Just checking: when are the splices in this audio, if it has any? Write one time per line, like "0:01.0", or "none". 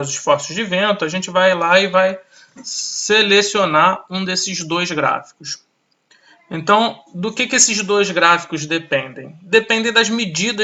none